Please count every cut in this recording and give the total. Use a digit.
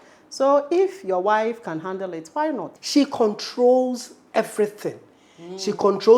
1